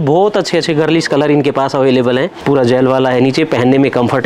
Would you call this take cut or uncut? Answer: cut